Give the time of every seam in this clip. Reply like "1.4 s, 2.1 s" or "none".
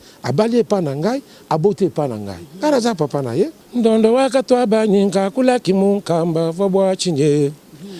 3.6 s